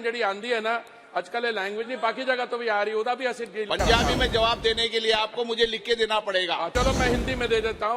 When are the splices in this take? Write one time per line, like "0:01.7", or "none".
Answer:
0:06.7